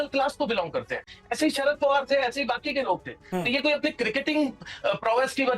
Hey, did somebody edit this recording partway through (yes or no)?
no